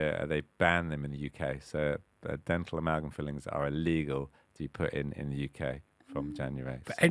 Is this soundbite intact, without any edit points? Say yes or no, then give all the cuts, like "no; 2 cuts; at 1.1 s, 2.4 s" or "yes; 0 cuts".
yes; 0 cuts